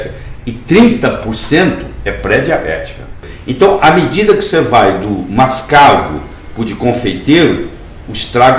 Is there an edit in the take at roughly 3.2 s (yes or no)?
yes